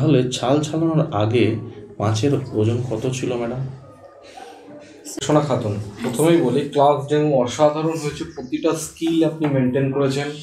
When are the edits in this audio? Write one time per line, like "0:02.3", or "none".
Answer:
0:05.2